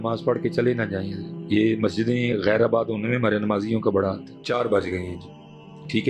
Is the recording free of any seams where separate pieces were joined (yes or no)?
no